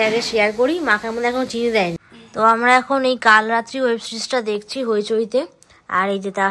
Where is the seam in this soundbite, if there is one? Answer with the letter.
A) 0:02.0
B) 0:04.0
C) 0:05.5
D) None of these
A